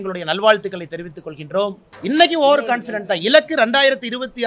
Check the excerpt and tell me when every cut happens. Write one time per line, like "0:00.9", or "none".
0:01.9